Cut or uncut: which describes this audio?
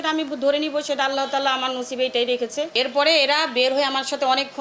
cut